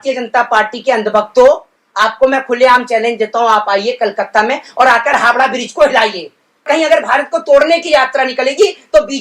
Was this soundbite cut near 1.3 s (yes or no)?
no